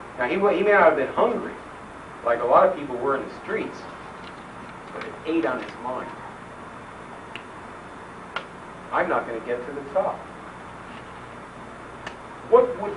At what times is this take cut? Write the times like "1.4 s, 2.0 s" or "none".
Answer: 10.4 s